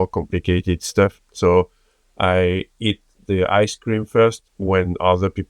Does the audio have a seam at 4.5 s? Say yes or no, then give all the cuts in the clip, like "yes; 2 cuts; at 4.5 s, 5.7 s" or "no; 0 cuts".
no; 1 cut; at 1.2 s